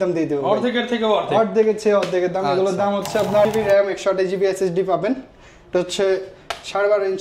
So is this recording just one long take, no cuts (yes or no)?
no